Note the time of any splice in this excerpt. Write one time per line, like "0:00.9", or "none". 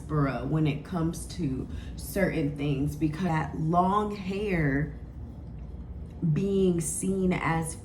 0:03.2